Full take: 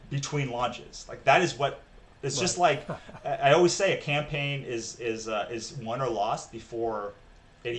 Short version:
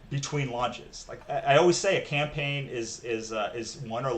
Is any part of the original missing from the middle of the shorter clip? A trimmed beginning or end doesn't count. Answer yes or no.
yes